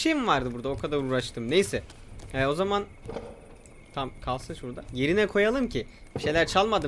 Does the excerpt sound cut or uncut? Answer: uncut